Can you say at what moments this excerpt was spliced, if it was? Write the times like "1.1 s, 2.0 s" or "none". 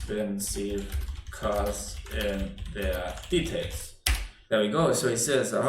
4.3 s